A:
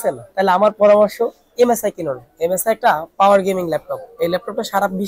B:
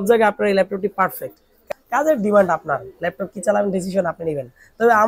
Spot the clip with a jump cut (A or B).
B